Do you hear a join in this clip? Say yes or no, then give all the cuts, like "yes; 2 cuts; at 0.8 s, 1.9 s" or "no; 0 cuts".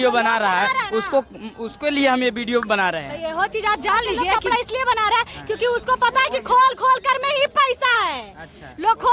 yes; 1 cut; at 4.4 s